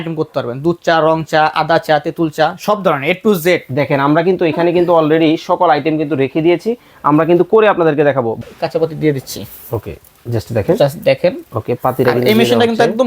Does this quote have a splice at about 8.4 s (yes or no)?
yes